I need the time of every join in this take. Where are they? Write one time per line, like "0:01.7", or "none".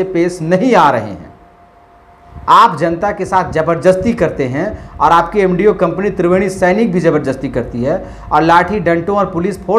none